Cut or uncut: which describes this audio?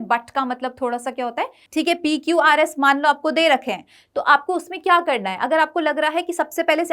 cut